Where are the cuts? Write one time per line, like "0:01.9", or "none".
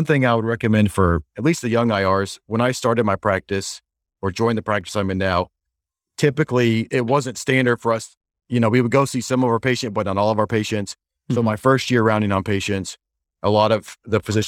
0:06.9